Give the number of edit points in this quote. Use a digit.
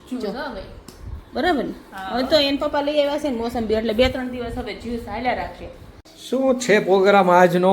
1